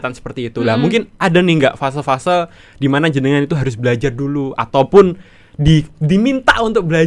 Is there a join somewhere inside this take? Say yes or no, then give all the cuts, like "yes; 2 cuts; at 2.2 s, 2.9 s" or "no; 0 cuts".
no; 0 cuts